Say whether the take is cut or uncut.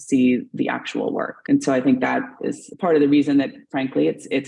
cut